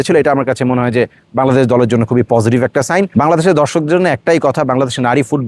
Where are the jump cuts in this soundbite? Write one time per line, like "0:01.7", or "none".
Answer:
0:03.1